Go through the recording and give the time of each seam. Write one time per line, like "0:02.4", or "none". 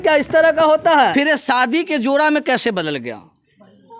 0:01.1